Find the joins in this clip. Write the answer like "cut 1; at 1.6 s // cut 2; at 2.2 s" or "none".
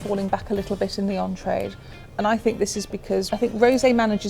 cut 1; at 3.3 s